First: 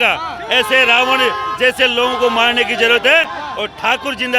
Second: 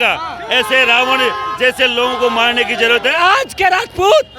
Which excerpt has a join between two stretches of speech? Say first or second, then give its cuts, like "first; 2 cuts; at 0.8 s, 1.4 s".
second; 1 cut; at 3.1 s